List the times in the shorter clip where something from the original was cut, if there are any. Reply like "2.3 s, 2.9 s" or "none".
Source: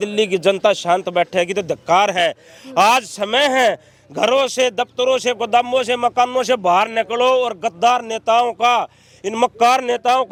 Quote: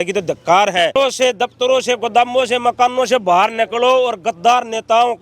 0.9 s